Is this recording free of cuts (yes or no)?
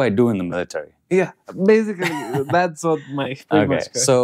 yes